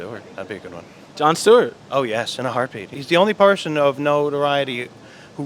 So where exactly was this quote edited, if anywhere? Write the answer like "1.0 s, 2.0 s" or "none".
2.9 s